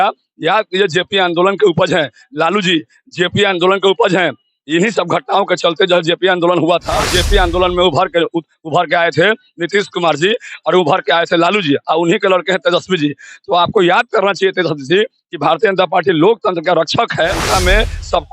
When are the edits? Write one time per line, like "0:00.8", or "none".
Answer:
0:06.9
0:17.4